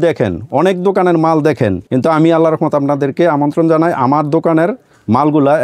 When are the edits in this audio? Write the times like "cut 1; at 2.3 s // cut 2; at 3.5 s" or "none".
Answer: cut 1; at 1.8 s